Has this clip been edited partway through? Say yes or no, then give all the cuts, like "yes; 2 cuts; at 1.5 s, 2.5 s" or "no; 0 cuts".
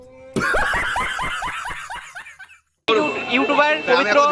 yes; 1 cut; at 2.9 s